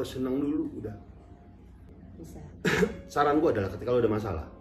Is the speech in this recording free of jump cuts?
no; 1 cut; at 1.9 s

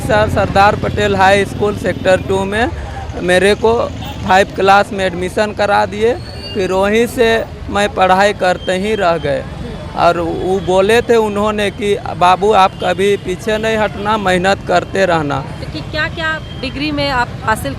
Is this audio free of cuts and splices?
yes; 0 cuts

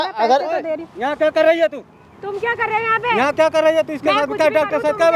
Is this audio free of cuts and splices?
yes; 0 cuts

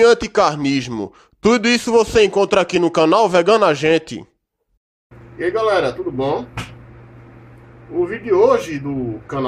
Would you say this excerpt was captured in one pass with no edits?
yes; 0 cuts

